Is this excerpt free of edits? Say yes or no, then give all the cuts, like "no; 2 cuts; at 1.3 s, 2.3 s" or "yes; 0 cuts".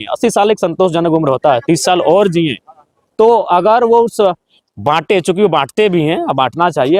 yes; 0 cuts